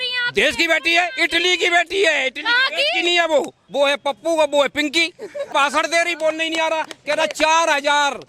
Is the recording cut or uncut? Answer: cut